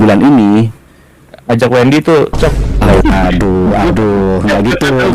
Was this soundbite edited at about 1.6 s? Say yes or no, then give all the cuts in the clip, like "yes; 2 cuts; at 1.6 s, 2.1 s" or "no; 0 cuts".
no; 1 cut; at 3.0 s